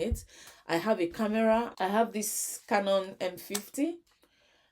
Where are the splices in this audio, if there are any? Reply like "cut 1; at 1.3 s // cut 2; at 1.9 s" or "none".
cut 1; at 1.7 s